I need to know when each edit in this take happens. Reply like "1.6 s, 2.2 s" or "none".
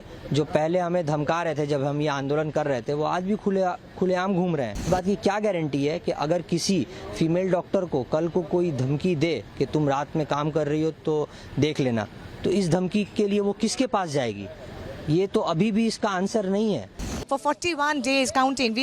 4.9 s, 17.1 s